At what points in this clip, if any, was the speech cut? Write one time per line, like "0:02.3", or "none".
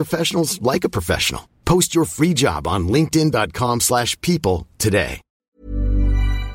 0:05.3